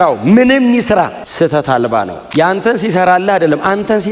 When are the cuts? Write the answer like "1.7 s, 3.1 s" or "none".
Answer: 1.2 s, 2.2 s